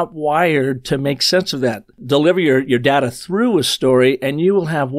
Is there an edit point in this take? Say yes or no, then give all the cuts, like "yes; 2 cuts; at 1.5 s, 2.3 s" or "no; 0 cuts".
yes; 1 cut; at 2.0 s